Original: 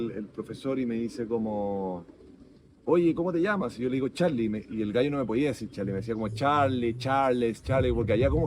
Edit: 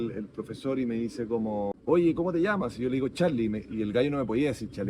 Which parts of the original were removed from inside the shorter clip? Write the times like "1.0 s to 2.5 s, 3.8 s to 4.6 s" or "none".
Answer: 1.7 s to 2.7 s